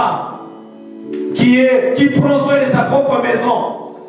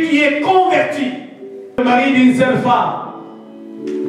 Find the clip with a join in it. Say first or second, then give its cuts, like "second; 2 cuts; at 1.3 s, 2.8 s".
second; 1 cut; at 1.8 s